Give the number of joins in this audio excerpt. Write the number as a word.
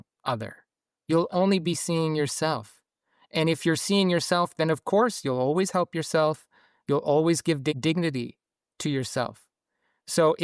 one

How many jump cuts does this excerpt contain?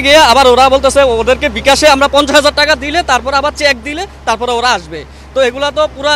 zero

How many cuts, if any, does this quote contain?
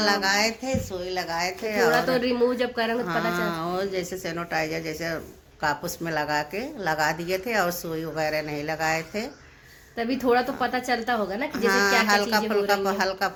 zero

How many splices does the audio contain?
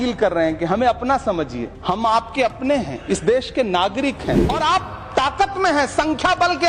two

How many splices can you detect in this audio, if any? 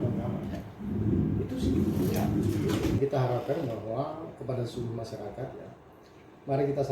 one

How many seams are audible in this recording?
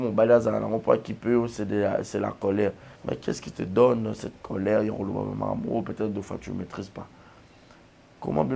one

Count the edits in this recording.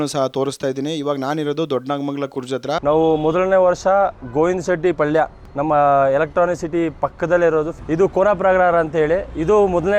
two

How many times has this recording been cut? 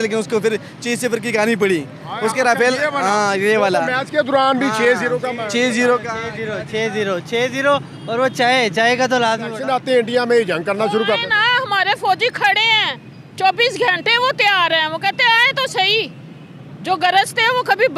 one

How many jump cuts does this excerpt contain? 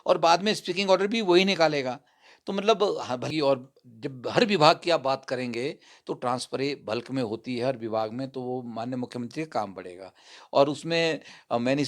one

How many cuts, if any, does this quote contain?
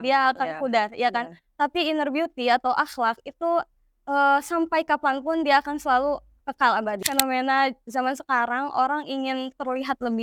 one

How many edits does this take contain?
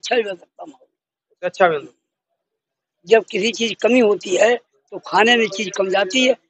zero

